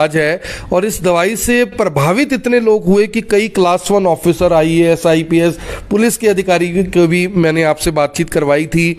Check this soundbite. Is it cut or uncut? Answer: uncut